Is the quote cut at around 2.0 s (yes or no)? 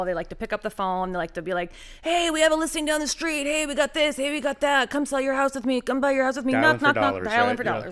no